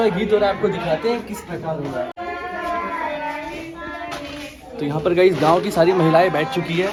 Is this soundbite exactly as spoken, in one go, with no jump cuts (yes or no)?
yes